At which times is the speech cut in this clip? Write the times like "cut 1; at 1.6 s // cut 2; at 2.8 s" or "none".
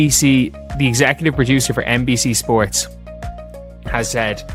none